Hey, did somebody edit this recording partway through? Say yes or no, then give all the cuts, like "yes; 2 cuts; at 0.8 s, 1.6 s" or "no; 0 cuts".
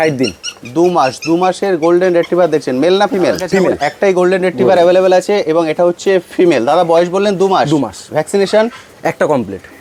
no; 0 cuts